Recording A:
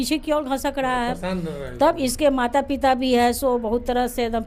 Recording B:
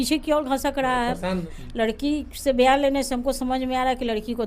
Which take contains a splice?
B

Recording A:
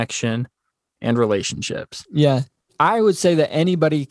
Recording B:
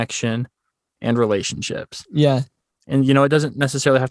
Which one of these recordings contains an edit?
A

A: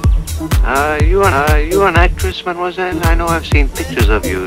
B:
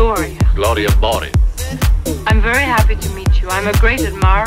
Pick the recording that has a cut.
B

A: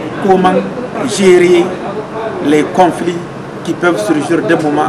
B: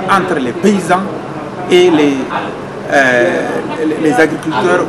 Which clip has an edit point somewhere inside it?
A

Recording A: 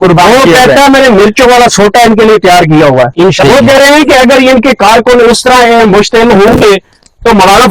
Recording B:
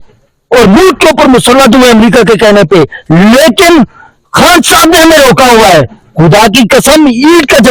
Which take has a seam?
A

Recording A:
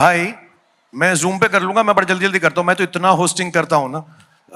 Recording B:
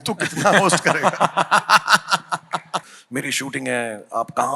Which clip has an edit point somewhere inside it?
B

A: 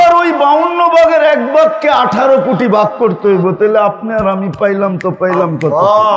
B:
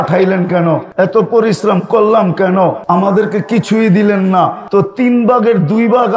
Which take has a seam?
B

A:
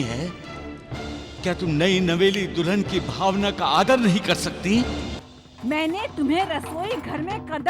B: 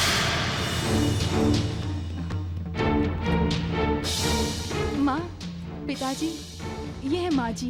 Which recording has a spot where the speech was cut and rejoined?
A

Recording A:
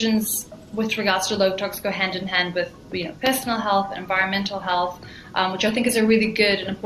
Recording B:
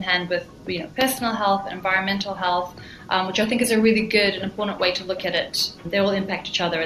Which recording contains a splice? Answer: B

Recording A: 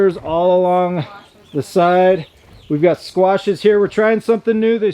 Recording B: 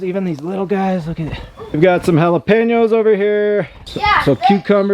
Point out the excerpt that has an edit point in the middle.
B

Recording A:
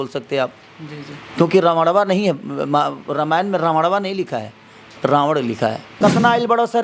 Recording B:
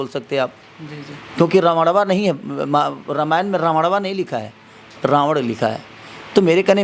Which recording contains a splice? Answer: A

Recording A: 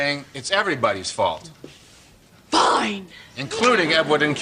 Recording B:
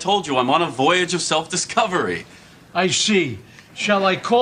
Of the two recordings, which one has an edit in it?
A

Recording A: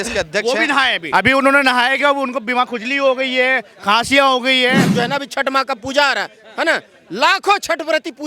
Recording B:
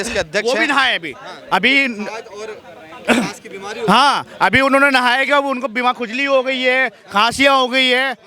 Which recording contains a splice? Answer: A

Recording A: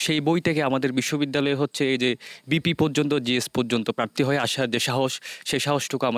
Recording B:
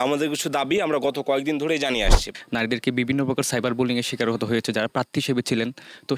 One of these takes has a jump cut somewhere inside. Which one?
B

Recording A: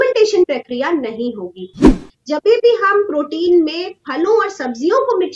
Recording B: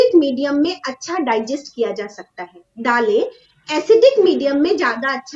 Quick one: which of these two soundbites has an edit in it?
A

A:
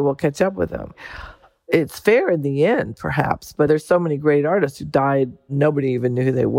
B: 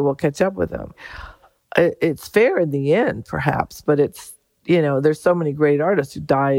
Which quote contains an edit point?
A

